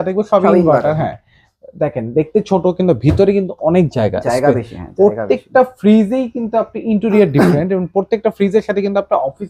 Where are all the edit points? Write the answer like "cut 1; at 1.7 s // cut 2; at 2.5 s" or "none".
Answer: none